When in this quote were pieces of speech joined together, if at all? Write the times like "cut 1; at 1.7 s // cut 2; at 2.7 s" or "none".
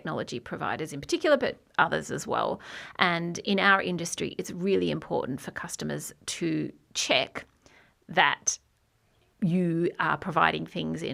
none